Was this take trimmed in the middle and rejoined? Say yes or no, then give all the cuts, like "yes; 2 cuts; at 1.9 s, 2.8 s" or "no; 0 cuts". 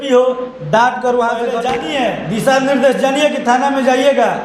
yes; 1 cut; at 1.7 s